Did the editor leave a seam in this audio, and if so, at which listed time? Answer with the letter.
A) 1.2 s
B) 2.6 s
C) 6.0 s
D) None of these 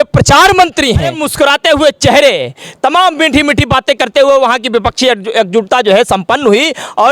A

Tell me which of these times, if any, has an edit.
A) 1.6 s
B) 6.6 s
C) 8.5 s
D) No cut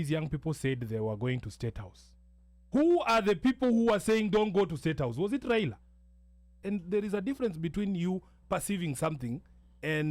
B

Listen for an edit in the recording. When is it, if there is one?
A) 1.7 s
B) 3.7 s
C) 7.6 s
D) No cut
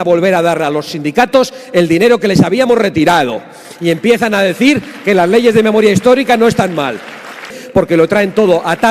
C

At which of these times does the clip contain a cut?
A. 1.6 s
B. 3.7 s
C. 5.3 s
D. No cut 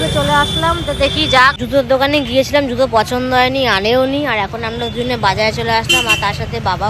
A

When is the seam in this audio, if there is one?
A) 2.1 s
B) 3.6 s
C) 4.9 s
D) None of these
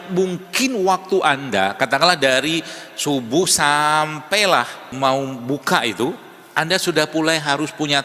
C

